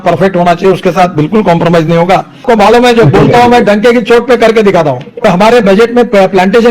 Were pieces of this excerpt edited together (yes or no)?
yes